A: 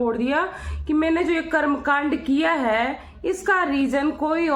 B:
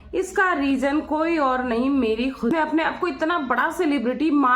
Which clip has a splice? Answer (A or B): B